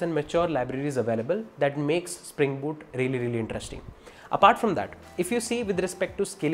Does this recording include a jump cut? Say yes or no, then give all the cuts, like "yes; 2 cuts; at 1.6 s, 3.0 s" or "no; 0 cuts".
no; 0 cuts